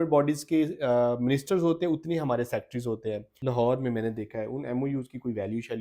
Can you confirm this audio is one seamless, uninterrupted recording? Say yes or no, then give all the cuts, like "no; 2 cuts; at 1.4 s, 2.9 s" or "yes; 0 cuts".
no; 1 cut; at 3.3 s